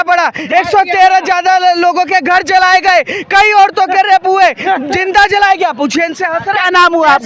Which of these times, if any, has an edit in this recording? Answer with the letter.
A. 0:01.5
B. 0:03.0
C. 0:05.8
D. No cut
D